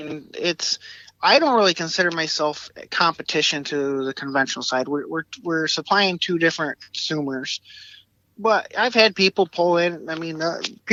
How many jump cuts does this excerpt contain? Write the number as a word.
zero